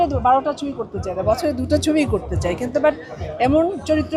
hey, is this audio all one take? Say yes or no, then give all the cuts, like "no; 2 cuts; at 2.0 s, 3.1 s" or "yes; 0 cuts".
yes; 0 cuts